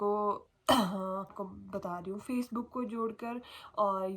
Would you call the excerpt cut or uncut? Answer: cut